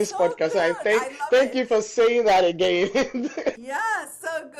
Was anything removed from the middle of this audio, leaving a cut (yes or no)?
no